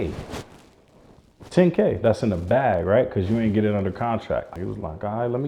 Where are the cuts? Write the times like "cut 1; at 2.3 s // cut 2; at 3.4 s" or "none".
cut 1; at 4.5 s